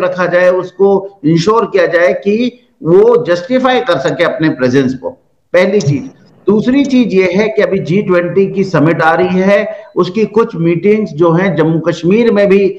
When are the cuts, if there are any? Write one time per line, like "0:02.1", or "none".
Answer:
none